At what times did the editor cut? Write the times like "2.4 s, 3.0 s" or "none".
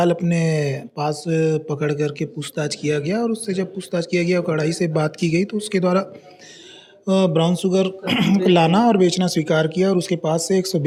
none